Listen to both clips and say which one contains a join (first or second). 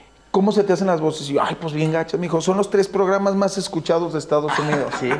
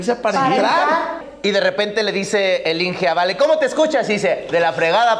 second